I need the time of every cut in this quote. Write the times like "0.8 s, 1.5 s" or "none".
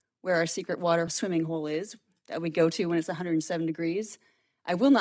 1.1 s